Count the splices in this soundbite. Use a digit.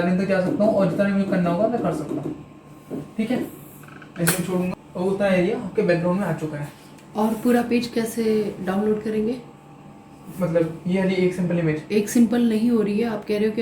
1